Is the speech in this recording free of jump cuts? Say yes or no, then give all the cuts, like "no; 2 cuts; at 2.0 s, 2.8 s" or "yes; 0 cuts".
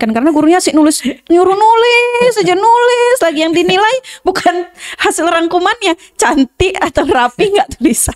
yes; 0 cuts